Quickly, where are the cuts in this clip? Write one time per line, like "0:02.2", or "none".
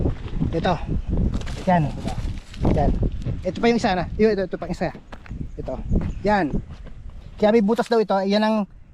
none